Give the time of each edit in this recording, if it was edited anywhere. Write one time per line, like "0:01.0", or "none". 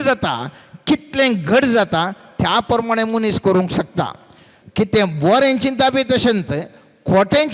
0:04.5